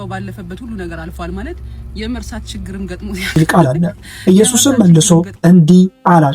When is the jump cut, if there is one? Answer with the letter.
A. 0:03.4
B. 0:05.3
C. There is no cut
A